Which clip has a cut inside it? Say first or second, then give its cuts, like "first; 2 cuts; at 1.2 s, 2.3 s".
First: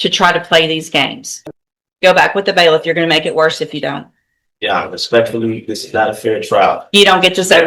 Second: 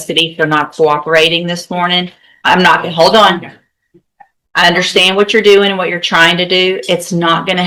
first; 1 cut; at 1.3 s